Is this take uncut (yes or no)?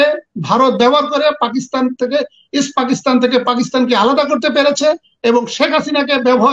yes